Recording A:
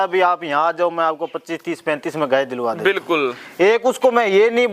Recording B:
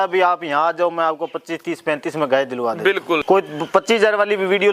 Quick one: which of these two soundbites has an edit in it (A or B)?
B